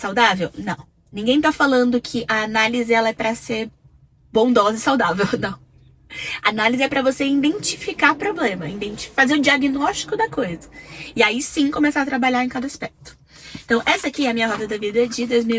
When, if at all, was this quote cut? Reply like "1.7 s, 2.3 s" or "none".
none